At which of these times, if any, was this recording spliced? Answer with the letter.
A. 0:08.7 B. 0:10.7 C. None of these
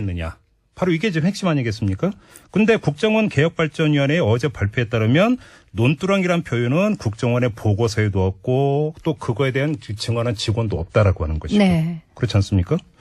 B